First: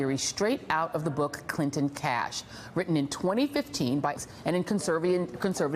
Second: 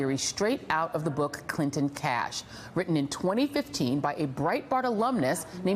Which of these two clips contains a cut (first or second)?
second